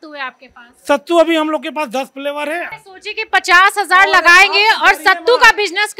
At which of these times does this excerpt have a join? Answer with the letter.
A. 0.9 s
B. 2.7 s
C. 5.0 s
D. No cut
B